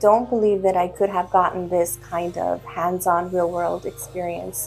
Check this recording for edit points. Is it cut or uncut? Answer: uncut